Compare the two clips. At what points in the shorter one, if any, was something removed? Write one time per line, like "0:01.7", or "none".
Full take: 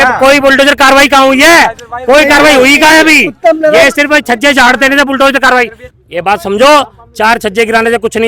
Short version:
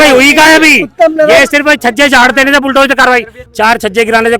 0:03.4